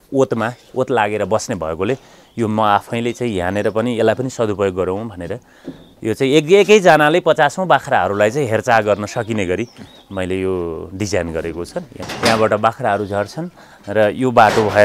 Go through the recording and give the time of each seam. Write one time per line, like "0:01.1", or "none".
0:12.0